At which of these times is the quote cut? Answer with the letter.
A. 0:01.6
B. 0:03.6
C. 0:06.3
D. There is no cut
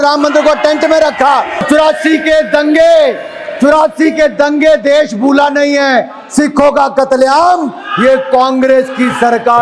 A